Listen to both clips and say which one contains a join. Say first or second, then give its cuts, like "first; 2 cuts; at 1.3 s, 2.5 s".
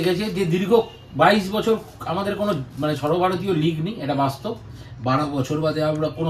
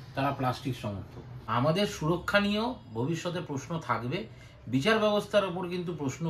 second; 1 cut; at 1.4 s